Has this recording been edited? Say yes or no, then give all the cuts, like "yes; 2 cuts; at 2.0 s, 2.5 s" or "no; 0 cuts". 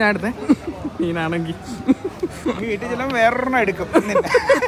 no; 0 cuts